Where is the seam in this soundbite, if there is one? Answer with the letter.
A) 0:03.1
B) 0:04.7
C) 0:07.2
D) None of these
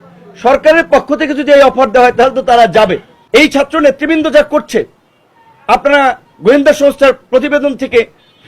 A